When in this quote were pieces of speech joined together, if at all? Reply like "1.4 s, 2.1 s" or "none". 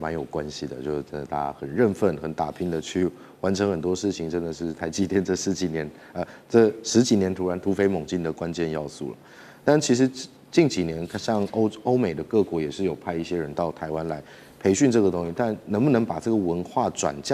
none